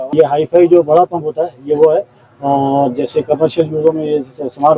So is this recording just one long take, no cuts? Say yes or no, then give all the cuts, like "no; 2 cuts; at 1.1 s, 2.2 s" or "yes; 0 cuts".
yes; 0 cuts